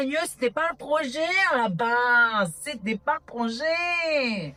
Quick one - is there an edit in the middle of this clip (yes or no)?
no